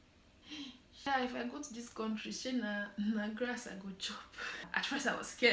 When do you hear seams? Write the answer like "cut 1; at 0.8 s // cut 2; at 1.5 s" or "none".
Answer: cut 1; at 1.1 s // cut 2; at 4.7 s